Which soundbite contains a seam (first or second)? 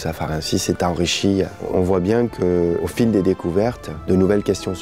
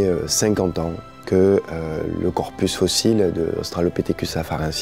first